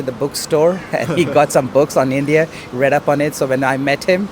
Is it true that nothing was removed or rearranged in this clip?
yes; 0 cuts

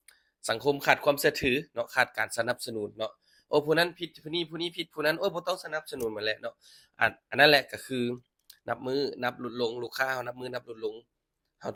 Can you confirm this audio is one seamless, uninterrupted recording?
yes; 0 cuts

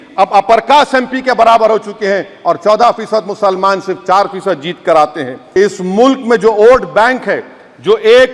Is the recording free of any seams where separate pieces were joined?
no; 1 cut; at 5.4 s

